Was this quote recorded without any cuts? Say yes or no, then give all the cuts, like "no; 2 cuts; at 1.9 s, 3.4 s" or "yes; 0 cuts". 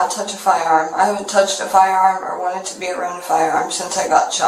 yes; 0 cuts